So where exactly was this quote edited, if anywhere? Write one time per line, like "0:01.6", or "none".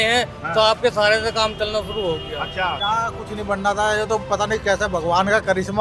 0:02.8